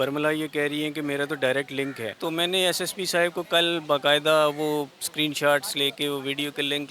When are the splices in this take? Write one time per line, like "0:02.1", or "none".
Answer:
0:02.2